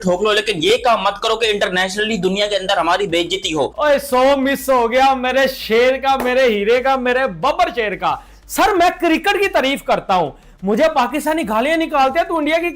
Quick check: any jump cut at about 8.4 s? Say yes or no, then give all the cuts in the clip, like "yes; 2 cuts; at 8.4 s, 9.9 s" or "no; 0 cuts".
no; 1 cut; at 3.7 s